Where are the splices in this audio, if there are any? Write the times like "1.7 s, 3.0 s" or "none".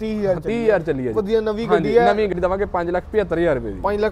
2.4 s